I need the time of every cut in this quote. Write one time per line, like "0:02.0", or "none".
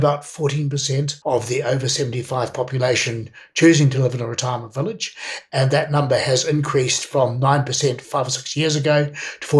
0:01.1

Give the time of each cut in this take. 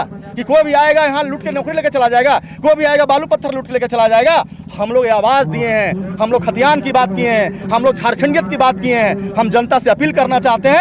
none

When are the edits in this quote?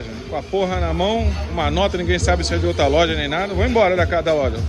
none

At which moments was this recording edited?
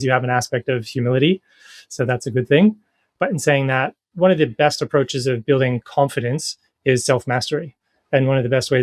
0:03.0
0:04.0

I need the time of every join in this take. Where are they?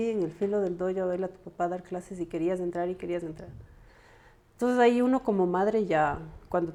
none

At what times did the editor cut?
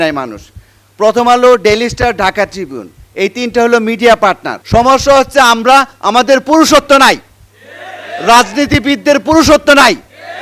0:04.5

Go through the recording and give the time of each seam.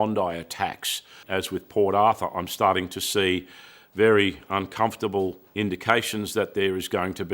0:01.2
0:05.4

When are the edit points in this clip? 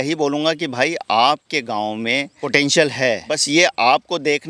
0:02.4
0:03.4

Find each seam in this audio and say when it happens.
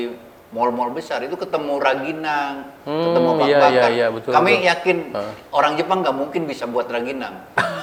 none

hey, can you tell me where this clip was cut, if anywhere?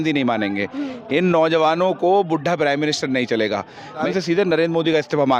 0:04.0

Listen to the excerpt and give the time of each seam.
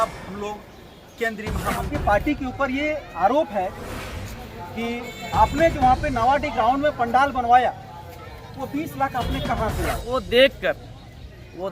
0:01.9
0:10.0

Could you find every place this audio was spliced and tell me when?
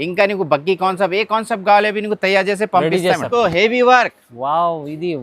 0:03.3

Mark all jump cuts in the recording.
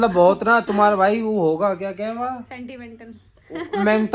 none

